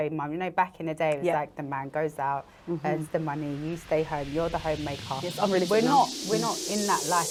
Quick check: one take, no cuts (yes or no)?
yes